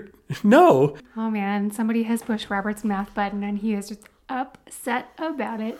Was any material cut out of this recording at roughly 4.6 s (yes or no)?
no